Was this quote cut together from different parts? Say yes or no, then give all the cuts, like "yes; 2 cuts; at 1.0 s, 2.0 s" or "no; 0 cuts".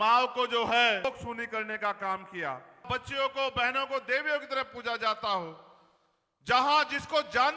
yes; 2 cuts; at 1.0 s, 2.9 s